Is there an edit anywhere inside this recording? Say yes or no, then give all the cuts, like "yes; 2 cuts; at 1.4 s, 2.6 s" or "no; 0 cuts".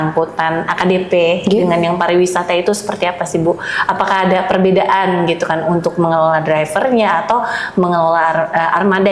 no; 0 cuts